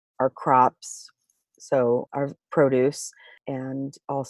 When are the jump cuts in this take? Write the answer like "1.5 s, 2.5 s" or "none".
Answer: 2.1 s, 3.3 s